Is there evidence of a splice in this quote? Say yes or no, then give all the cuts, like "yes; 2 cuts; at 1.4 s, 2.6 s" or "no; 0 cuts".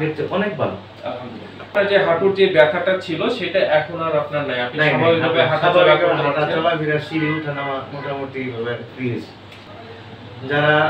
yes; 2 cuts; at 1.7 s, 9.7 s